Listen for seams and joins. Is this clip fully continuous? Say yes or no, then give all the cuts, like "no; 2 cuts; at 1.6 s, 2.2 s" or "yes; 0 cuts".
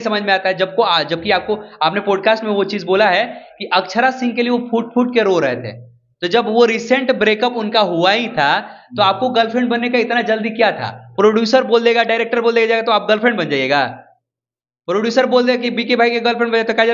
yes; 0 cuts